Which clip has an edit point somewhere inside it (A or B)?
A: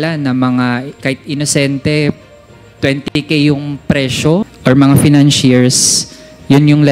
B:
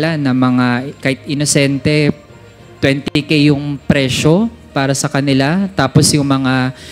A